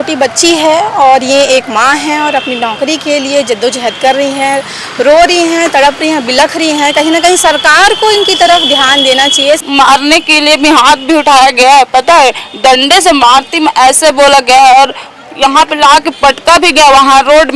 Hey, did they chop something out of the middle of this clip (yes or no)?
yes